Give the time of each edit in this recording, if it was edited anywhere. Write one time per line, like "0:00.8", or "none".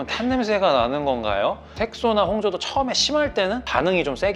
0:01.7